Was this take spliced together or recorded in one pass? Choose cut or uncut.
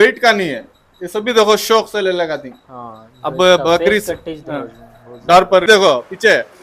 cut